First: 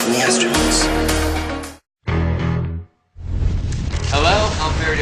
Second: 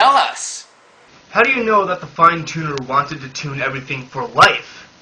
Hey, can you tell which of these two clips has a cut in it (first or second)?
second